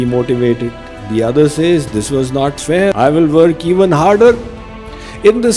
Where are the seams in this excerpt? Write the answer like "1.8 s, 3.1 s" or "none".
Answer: 2.9 s